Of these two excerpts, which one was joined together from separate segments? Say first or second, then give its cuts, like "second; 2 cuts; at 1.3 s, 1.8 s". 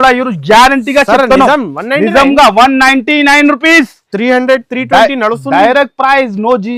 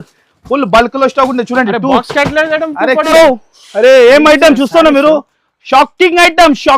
second; 1 cut; at 3.1 s